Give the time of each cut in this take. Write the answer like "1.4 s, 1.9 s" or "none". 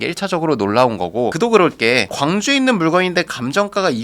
1.3 s